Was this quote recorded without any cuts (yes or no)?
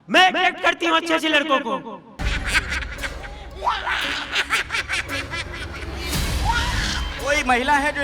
no